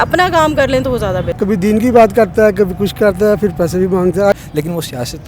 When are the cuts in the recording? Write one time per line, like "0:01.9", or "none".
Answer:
0:01.3
0:04.3